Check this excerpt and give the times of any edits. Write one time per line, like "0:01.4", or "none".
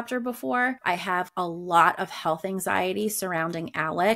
0:01.1